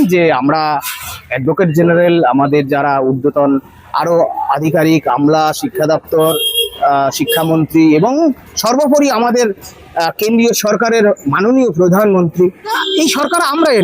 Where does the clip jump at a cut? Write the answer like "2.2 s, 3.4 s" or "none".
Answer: 12.8 s